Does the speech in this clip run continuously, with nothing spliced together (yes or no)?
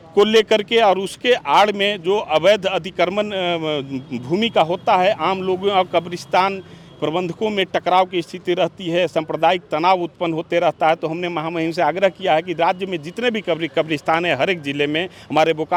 yes